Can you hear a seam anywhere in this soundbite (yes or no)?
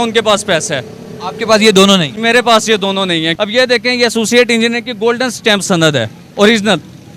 yes